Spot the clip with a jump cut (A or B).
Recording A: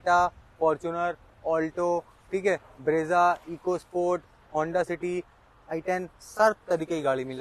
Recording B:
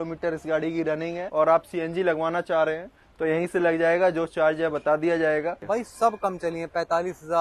B